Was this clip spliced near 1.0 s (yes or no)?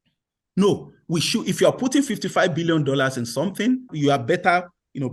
no